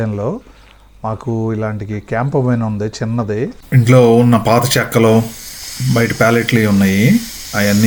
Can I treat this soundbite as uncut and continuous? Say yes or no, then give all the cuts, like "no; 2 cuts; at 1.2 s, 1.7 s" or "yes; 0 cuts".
yes; 0 cuts